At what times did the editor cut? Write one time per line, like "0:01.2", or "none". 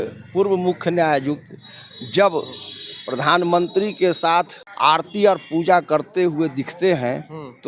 0:04.6